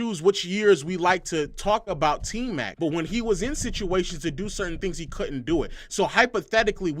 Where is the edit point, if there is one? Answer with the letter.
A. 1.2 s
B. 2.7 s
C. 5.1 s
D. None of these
B